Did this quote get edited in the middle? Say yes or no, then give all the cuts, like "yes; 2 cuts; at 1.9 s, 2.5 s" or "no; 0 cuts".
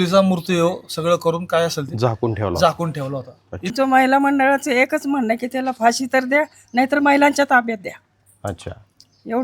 yes; 1 cut; at 3.7 s